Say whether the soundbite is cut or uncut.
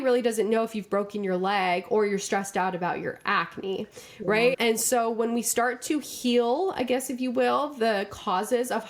uncut